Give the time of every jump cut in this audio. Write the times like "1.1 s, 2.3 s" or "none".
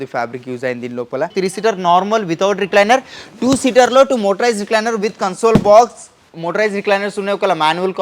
1.3 s